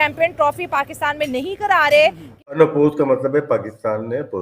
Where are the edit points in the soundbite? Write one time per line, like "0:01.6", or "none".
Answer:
0:02.6

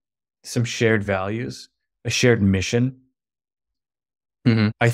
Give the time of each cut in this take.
0:03.7

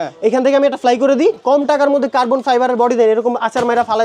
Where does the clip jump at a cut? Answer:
0:01.4

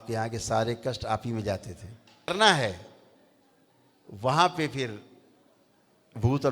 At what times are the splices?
0:02.3

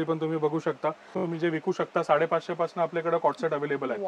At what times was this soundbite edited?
0:01.1

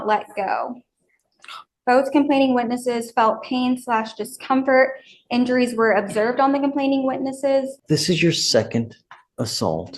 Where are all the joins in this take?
0:07.8

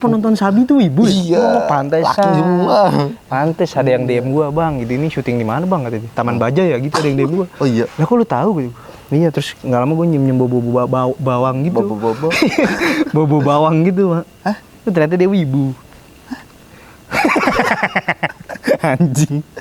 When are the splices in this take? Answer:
none

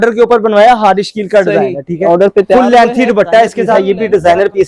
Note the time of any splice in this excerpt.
0:01.9
0:03.8

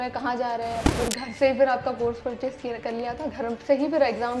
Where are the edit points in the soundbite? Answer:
0:00.9

